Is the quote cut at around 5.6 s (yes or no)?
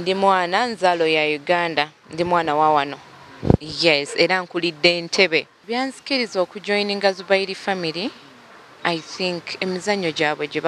yes